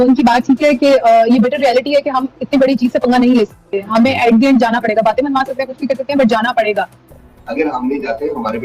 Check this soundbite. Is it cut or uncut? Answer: cut